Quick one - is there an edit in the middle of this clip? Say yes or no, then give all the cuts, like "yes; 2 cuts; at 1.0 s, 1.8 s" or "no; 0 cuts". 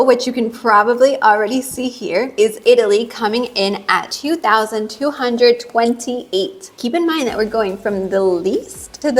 no; 0 cuts